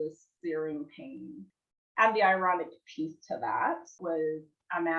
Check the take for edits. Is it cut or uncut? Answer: cut